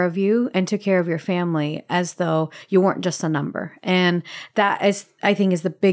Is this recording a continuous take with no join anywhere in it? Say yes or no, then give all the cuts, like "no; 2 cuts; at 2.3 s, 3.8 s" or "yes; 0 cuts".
yes; 0 cuts